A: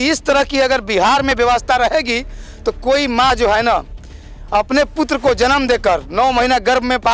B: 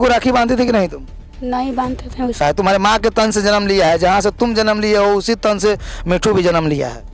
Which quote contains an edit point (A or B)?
B